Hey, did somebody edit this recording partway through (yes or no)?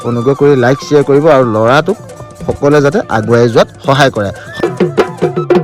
yes